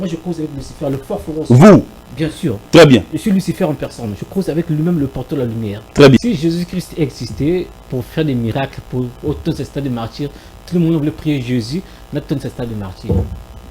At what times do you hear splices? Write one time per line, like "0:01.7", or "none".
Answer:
0:06.2

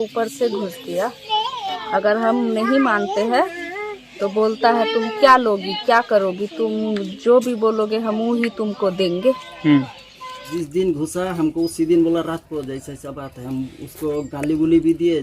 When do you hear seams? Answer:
0:01.8
0:10.5

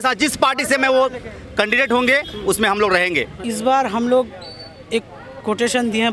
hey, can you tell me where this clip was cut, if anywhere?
0:03.3

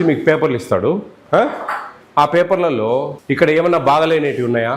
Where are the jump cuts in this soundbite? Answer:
0:03.2

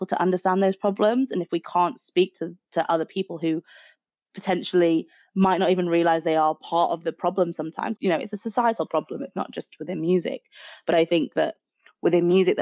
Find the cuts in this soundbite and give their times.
0:07.9

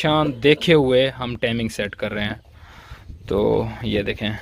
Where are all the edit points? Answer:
none

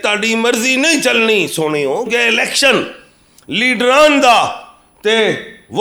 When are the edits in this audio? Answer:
0:02.1

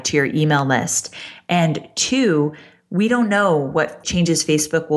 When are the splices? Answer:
0:04.0

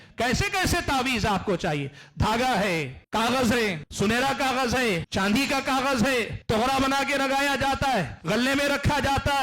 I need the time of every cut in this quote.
0:03.0
0:03.8
0:05.1
0:06.4
0:08.1

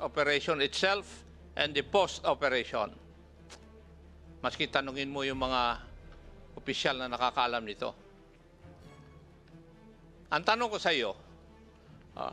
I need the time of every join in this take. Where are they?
none

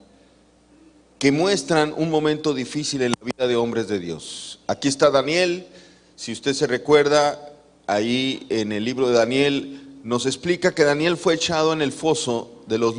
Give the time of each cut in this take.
none

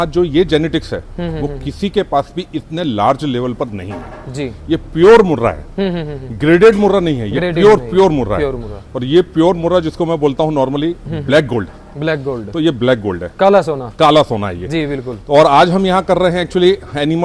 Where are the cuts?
none

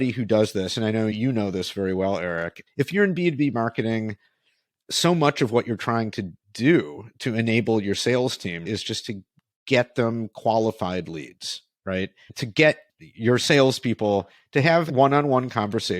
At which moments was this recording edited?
0:01.1
0:02.6
0:08.6
0:12.7
0:14.9

